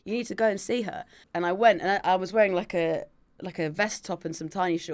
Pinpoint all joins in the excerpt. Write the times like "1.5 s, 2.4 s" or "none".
1.2 s